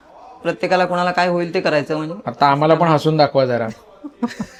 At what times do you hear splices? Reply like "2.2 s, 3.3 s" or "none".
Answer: none